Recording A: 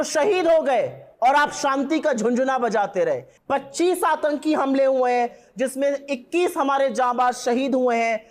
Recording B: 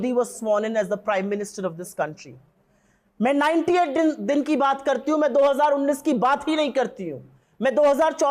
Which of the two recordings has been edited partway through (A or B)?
A